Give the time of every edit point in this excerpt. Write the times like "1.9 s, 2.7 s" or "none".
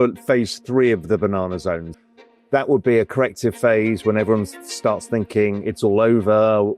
1.9 s